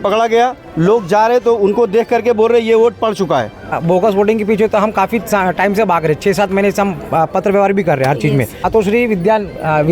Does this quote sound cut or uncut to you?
cut